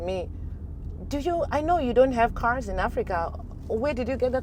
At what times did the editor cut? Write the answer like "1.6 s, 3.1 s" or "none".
none